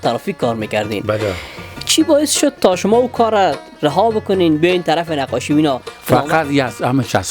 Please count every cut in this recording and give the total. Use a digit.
1